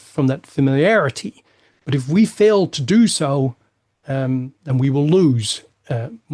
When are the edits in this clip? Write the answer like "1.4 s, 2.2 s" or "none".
none